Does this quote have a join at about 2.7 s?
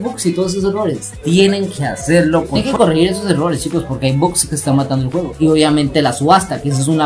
yes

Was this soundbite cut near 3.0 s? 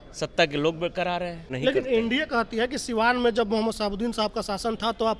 no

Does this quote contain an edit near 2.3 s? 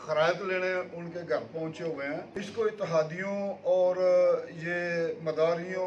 yes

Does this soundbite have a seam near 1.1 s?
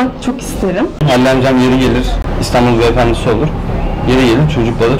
yes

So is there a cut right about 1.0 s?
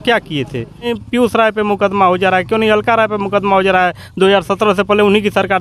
yes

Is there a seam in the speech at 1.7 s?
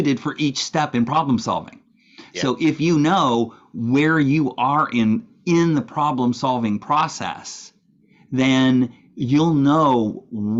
no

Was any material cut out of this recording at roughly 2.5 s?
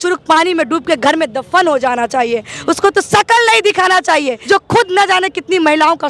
no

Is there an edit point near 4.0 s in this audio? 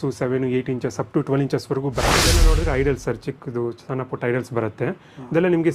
no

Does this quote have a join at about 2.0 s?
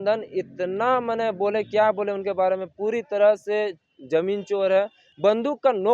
no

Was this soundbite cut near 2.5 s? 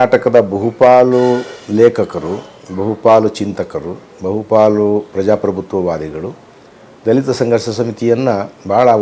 no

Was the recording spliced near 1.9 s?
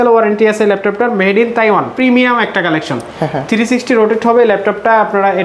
yes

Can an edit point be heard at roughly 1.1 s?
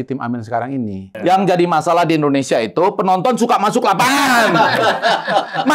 yes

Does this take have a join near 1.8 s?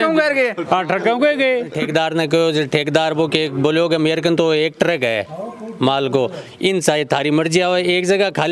yes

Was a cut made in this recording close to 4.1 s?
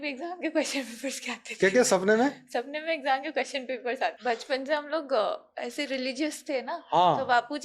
yes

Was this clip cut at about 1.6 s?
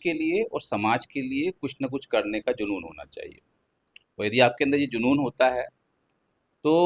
no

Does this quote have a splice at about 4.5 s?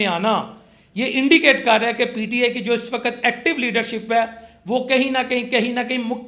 no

